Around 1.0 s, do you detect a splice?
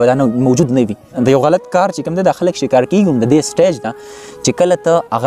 yes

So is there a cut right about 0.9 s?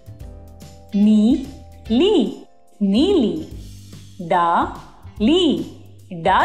yes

